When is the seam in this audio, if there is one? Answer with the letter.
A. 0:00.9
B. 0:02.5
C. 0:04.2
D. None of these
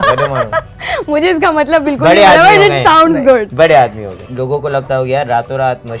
C